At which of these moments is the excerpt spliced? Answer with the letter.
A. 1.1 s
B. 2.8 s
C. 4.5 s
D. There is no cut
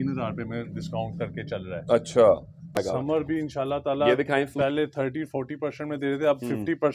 B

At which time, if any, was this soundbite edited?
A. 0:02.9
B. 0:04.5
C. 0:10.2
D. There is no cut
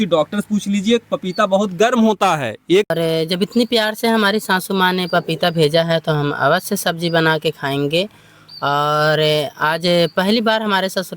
A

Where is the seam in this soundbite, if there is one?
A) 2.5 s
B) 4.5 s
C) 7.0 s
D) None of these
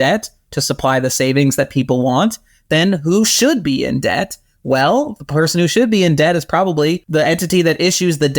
C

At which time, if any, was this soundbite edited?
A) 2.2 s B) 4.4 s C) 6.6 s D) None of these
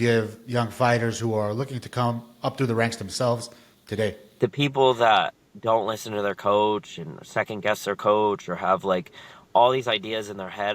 B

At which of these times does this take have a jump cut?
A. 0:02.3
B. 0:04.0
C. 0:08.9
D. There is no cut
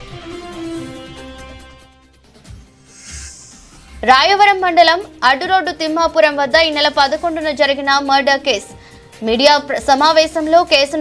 B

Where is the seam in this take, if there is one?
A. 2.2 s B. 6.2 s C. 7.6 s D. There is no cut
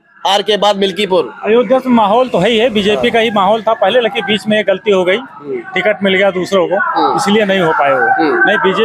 D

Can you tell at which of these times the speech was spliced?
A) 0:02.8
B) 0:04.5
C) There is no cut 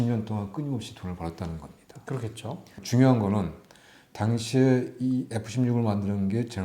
A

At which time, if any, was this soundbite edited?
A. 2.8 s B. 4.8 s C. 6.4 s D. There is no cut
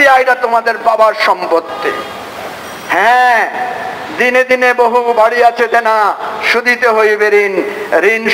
D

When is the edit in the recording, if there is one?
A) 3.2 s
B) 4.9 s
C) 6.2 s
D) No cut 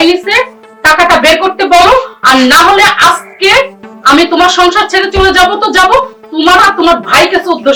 D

